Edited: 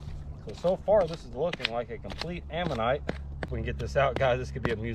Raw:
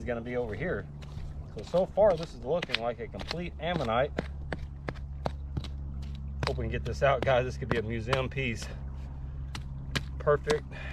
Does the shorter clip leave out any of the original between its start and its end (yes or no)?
yes